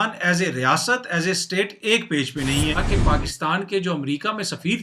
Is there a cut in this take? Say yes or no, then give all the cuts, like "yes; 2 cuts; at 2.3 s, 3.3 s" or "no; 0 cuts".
yes; 1 cut; at 2.8 s